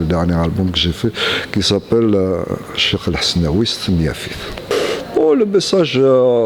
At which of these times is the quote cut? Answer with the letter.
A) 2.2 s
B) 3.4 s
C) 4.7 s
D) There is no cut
C